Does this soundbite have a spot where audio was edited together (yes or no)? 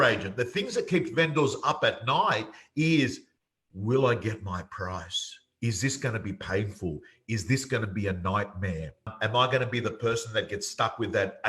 yes